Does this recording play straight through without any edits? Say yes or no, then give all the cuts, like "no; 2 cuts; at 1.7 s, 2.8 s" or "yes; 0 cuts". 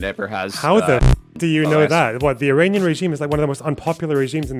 yes; 0 cuts